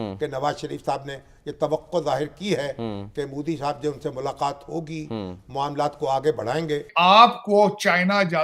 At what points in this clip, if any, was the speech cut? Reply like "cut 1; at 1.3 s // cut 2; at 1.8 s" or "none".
cut 1; at 6.9 s